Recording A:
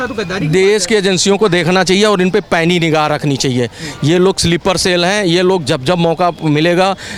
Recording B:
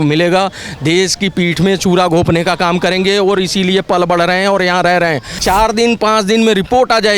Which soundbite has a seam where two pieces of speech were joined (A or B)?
B